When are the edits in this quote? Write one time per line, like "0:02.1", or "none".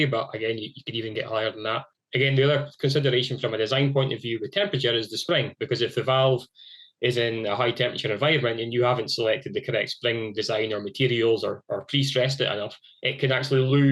0:01.8

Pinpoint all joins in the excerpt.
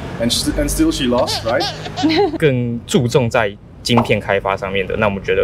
0:02.3

